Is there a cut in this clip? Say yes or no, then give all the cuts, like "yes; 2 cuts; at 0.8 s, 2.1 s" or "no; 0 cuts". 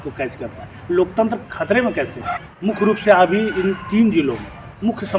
yes; 1 cut; at 2.5 s